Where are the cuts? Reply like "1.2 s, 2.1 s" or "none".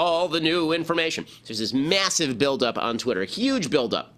2.1 s